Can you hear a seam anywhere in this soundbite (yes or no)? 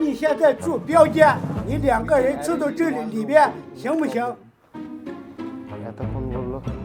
no